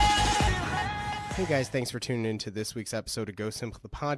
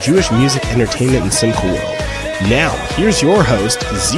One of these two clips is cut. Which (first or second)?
first